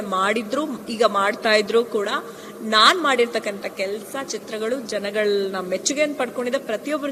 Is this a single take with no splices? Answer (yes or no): yes